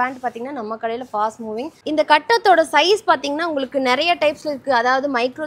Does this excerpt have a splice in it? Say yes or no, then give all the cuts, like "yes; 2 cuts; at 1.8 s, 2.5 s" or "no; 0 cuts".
yes; 1 cut; at 1.8 s